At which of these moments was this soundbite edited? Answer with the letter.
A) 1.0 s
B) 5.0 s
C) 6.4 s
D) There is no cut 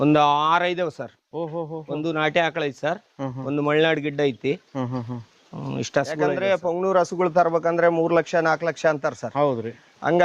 C